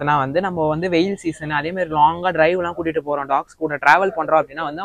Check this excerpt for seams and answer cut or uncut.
uncut